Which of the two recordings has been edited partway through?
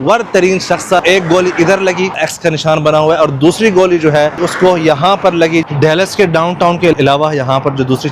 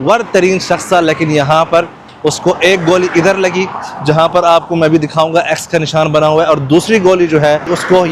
first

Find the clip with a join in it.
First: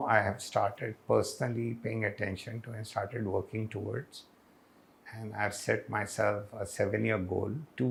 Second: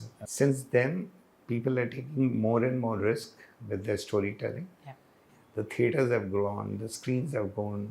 second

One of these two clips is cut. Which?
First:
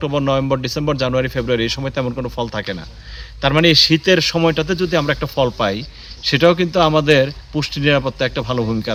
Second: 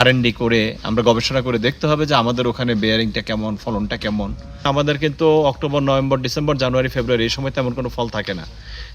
second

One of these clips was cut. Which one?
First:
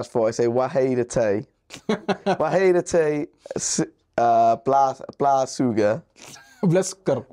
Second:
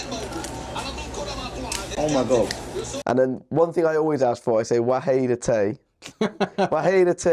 second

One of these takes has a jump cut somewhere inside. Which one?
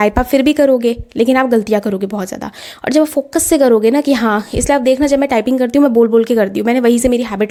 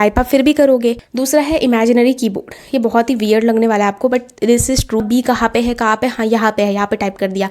second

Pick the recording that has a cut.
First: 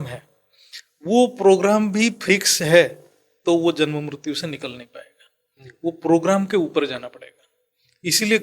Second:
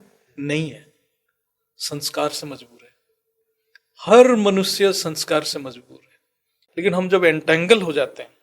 second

